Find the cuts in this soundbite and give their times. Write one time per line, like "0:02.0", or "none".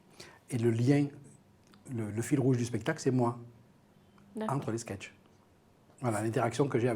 none